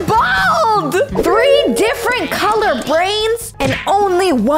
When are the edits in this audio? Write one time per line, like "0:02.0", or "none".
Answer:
0:01.1
0:03.5